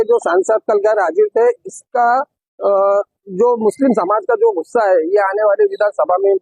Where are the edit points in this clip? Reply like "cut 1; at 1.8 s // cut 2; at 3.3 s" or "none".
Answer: none